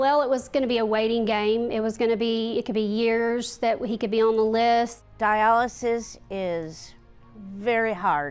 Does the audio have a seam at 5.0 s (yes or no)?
yes